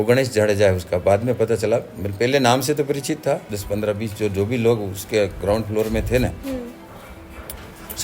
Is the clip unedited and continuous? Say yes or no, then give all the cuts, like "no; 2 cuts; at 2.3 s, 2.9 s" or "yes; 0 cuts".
no; 1 cut; at 3.5 s